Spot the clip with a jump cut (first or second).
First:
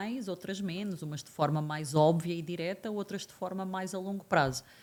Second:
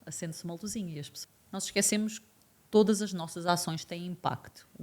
second